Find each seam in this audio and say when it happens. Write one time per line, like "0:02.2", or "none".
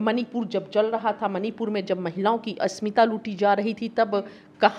none